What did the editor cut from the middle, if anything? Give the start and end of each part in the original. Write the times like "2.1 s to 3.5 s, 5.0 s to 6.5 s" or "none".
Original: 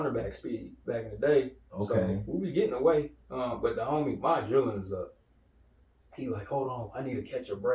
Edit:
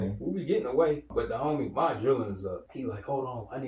3.1 s to 3.5 s, 5.1 s to 6.1 s